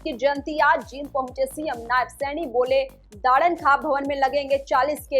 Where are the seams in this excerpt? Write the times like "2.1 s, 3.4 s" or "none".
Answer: 3.0 s

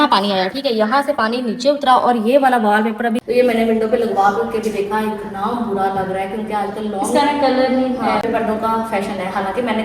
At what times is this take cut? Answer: 3.2 s, 8.2 s

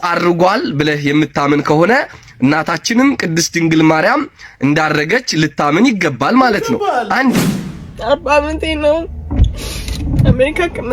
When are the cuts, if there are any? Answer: 7.3 s

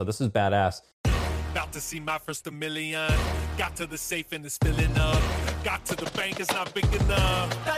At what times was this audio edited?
1.0 s

